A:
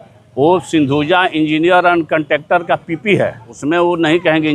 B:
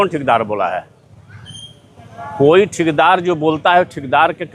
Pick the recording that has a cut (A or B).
A